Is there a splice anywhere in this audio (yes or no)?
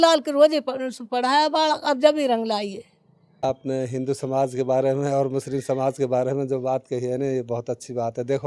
yes